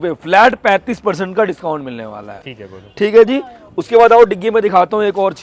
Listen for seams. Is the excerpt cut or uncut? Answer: uncut